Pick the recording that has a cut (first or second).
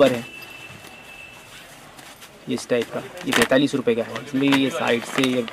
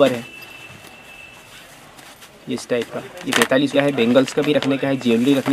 second